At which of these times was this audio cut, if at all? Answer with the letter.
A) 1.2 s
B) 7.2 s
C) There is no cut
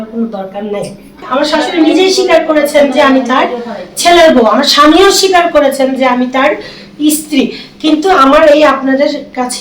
A